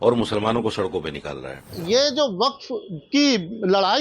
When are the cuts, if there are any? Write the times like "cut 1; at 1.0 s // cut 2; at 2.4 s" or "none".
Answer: cut 1; at 1.7 s